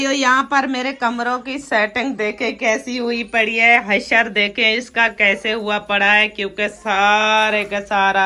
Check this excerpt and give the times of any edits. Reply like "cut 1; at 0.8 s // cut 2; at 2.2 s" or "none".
none